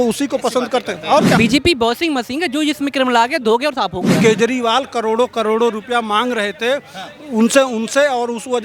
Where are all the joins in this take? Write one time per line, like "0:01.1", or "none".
0:01.4
0:04.1